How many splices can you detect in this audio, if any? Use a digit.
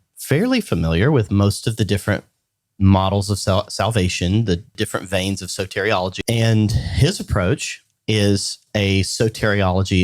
2